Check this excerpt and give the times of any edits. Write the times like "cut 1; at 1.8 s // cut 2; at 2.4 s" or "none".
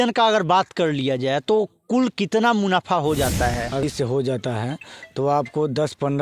cut 1; at 3.8 s